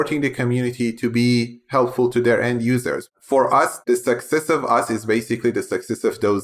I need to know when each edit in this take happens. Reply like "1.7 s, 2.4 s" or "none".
3.1 s